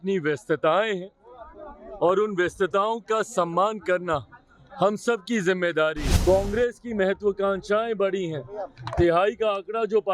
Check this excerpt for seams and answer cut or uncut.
cut